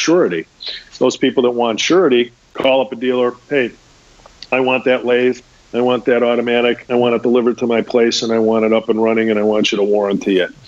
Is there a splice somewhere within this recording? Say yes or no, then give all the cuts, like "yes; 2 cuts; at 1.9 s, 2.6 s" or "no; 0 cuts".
yes; 1 cut; at 2.4 s